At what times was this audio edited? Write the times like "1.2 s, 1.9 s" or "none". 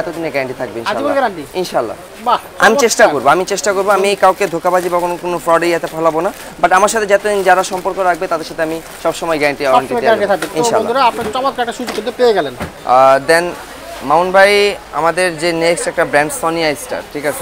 none